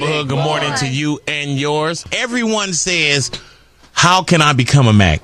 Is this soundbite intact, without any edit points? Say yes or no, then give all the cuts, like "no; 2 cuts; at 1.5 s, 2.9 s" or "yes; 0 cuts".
yes; 0 cuts